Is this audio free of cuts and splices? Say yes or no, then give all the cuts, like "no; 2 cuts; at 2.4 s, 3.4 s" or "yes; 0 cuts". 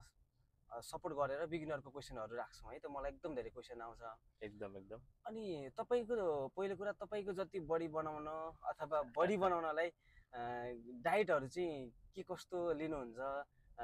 yes; 0 cuts